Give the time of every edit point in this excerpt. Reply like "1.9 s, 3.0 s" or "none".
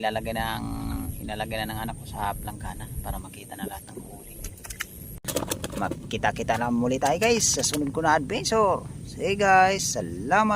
5.1 s